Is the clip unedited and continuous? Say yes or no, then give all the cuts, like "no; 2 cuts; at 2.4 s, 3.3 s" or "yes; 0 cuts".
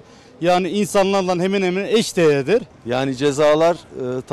no; 1 cut; at 2.8 s